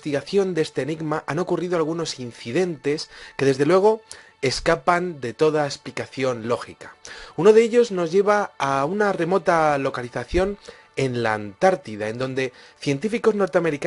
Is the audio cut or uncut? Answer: cut